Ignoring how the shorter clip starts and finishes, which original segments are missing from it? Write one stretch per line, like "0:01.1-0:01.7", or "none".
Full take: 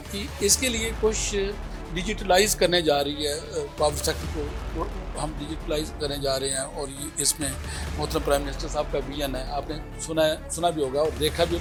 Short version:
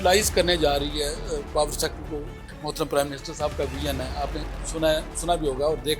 0:04.6-0:07.7

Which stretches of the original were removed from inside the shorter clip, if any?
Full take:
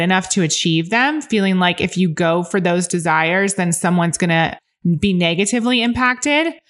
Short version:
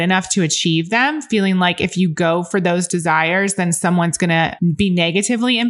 0:04.5-0:04.8

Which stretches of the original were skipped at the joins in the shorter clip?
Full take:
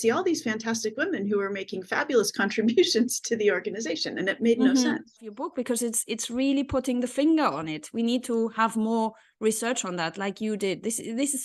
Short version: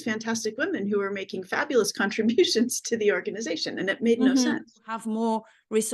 0:05.4-0:08.7

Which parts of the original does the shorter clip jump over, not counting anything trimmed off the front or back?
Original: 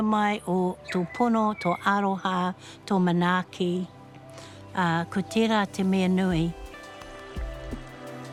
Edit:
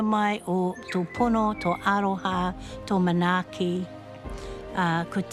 none

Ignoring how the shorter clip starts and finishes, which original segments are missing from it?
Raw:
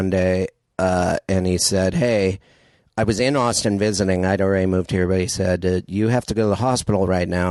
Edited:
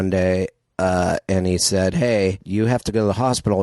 0:02.4-0:05.9

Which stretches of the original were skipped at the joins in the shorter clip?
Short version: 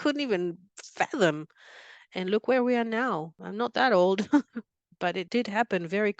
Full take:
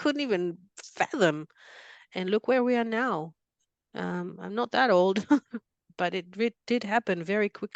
0:03.4-0:04.4
0:06.2-0:06.6

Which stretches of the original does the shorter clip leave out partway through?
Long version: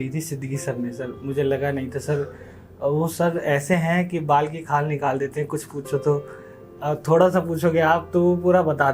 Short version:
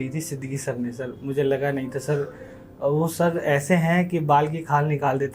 none

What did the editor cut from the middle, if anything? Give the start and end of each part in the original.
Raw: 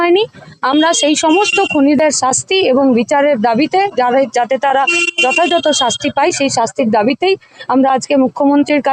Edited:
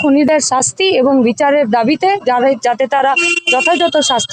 none

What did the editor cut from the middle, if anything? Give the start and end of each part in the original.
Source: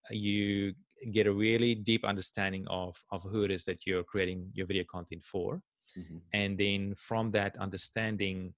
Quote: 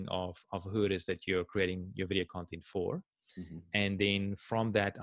none

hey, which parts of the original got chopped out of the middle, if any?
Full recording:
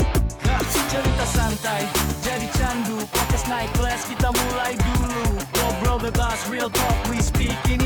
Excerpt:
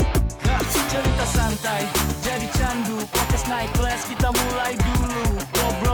none

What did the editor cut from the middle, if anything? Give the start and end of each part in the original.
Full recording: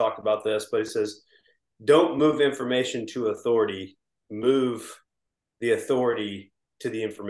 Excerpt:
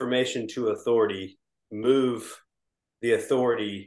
none

